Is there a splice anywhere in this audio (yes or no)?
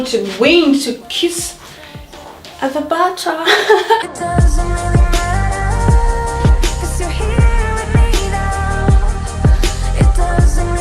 yes